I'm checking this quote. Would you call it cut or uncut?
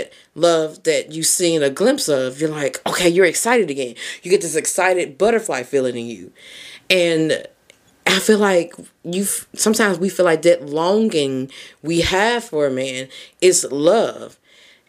uncut